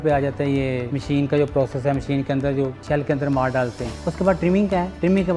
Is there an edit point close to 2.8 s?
no; 0 cuts

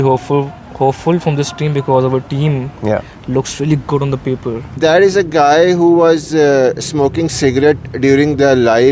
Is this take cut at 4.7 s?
yes; 1 cut; at 4.7 s

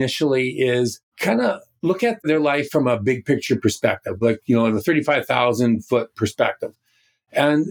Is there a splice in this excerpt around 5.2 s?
no; 1 cut; at 1.1 s

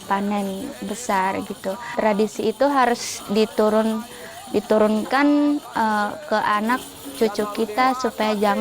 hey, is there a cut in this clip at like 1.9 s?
yes; 1 cut; at 1.9 s

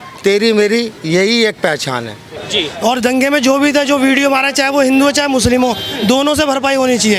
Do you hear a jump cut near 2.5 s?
yes; 1 cut; at 2.5 s

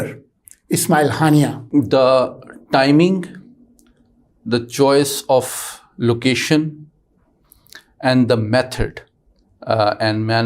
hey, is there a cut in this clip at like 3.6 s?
no; 1 cut; at 1.6 s

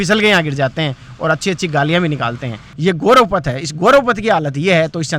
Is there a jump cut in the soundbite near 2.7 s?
yes; 1 cut; at 2.7 s

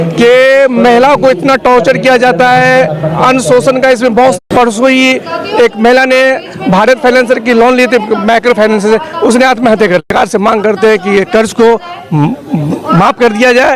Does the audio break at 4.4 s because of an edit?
yes; 2 cuts; at 4.4 s, 10.1 s

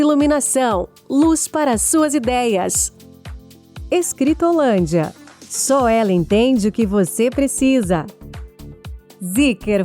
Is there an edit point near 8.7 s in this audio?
yes; 1 cut; at 8.7 s

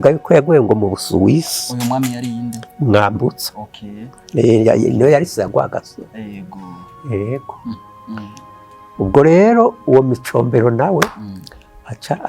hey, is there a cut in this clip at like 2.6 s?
no; 1 cut; at 7.8 s

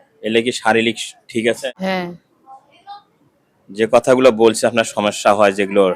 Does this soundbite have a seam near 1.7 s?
yes; 1 cut; at 1.7 s

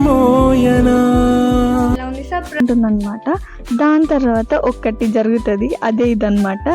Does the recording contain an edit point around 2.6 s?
yes; 1 cut; at 2.6 s

